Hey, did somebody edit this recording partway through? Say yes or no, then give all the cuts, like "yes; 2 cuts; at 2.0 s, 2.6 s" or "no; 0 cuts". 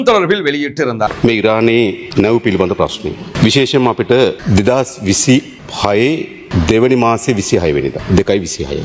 yes; 7 cuts; at 1.1 s, 2.0 s, 3.3 s, 4.4 s, 5.6 s, 6.4 s, 8.0 s